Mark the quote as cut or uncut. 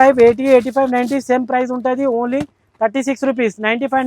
uncut